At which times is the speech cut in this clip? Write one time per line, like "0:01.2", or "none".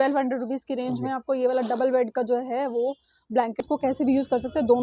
0:03.5